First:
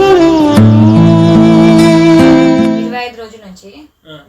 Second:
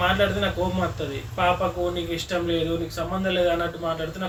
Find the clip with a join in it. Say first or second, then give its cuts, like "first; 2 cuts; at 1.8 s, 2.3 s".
first; 1 cut; at 2.8 s